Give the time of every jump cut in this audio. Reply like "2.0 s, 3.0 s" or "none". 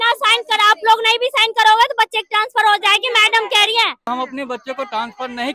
4.1 s